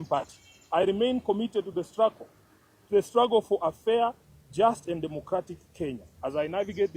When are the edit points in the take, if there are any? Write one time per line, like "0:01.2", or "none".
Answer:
none